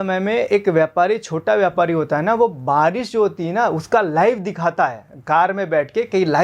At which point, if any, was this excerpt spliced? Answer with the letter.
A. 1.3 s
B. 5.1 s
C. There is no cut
C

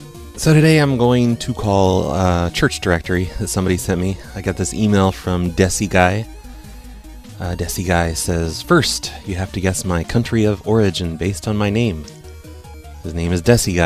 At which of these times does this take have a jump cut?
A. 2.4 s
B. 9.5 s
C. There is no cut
C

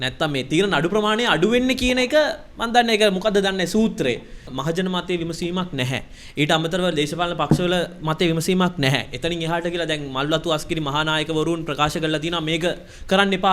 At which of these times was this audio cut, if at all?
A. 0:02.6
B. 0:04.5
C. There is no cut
B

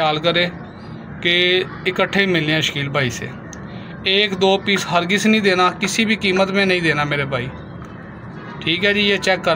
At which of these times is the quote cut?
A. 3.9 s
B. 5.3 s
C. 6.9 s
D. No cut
D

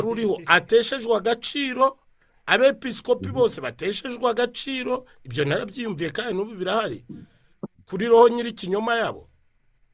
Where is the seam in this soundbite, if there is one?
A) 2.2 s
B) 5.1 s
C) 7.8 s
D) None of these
D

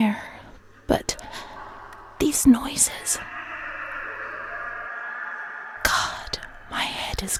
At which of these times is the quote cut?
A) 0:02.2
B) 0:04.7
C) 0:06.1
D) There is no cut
D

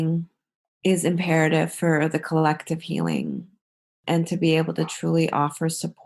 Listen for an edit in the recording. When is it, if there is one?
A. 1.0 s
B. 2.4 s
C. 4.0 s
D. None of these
C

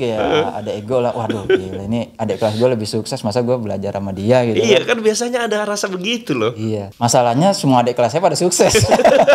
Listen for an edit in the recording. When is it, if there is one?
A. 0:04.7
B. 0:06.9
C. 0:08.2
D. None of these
B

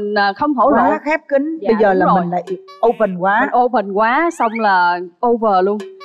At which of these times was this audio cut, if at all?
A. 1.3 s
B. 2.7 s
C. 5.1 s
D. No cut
D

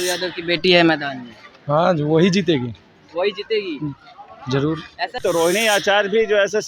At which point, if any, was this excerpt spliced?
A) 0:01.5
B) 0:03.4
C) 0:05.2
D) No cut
C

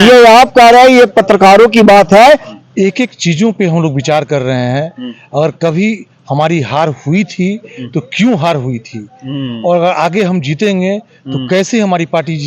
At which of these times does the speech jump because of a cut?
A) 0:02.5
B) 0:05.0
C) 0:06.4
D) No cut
A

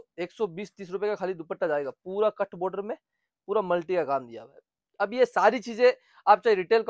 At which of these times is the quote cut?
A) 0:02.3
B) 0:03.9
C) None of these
C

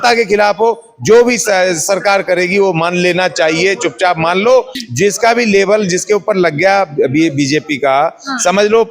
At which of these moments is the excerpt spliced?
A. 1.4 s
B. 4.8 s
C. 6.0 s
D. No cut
B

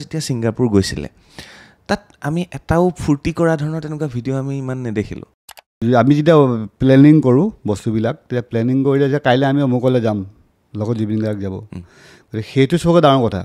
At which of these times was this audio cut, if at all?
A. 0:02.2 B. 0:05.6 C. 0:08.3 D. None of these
B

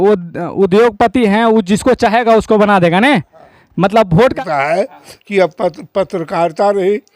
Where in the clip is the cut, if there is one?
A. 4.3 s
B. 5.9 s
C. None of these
A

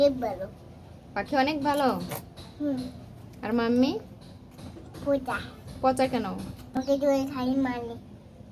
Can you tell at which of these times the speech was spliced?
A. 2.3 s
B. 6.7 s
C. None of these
B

